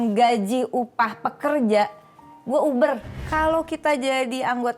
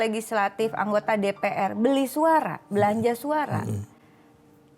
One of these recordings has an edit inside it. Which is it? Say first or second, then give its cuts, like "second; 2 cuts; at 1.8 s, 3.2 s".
first; 1 cut; at 3.1 s